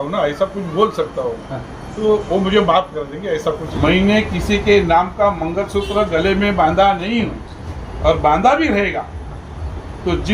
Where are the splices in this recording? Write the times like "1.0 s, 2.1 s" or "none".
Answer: 3.7 s